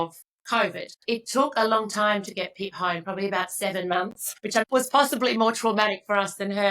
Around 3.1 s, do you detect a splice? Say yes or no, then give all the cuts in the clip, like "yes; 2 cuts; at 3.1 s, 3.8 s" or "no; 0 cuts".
no; 2 cuts; at 1.0 s, 4.4 s